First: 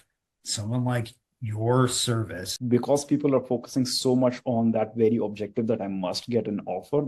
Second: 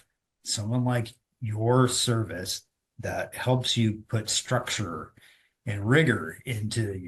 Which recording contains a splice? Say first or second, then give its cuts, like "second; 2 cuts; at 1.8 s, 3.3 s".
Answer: first; 1 cut; at 2.5 s